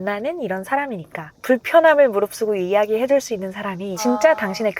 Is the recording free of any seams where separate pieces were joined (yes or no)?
no